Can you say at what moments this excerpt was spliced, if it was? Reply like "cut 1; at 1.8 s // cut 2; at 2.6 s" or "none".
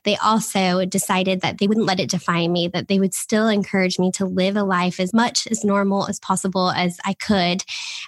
cut 1; at 5.1 s

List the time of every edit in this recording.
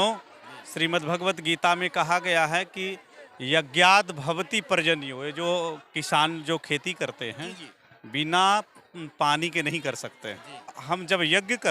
cut 1; at 10.8 s

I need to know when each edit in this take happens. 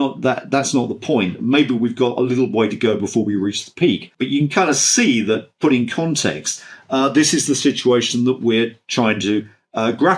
cut 1; at 4.1 s

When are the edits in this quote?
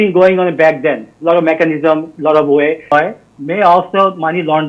cut 1; at 2.9 s

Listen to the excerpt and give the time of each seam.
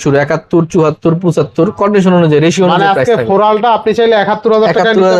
none

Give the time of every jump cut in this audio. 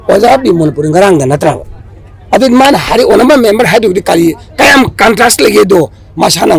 none

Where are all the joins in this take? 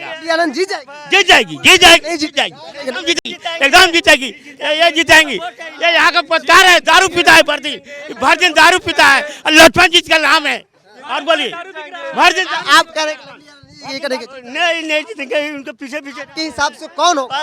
none

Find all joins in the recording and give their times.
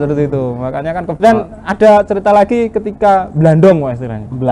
cut 1; at 1.1 s

